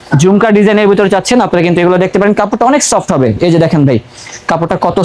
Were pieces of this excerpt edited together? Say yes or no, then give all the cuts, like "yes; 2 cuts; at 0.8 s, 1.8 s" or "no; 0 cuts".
no; 0 cuts